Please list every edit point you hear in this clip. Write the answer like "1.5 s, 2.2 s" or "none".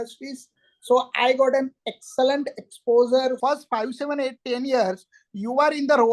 3.4 s